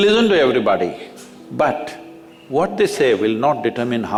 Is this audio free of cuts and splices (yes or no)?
yes